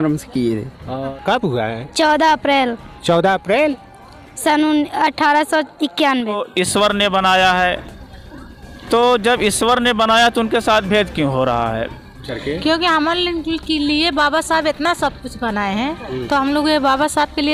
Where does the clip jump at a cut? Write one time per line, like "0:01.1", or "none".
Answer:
0:01.1
0:06.4
0:12.1